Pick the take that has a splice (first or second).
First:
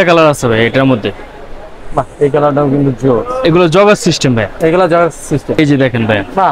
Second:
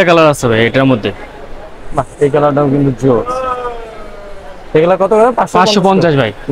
first